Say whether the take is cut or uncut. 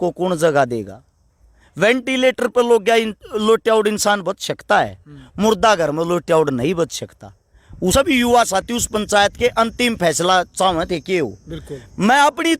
cut